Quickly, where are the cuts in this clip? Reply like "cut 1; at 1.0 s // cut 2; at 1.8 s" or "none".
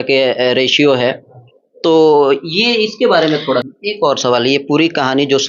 cut 1; at 3.7 s